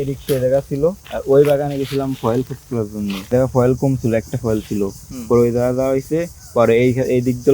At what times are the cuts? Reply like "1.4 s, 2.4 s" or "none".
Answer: 1.1 s, 3.3 s